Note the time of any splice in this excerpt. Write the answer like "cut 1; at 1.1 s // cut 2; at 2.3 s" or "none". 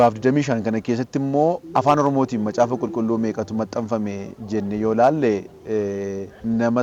none